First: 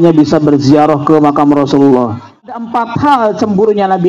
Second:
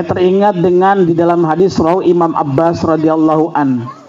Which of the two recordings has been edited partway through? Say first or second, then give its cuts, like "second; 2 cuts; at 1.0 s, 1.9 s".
first; 1 cut; at 2.9 s